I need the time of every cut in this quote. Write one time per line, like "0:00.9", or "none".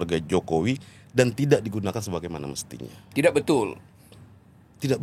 none